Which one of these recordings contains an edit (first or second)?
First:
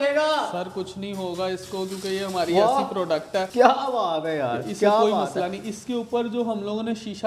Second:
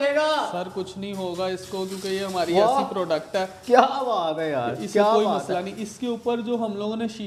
first